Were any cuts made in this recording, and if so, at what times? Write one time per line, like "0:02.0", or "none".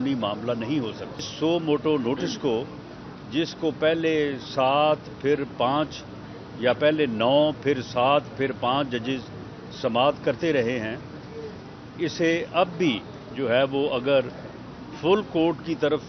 0:01.3

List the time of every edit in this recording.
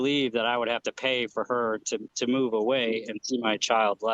0:02.1

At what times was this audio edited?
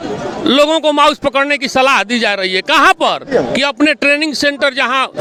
none

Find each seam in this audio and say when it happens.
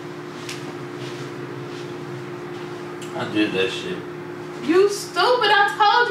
none

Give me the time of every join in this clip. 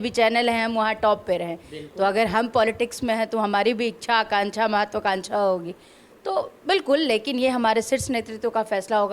none

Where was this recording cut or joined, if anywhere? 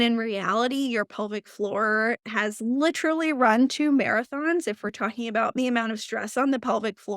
0:05.6

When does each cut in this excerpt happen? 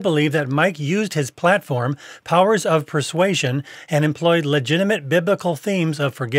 none

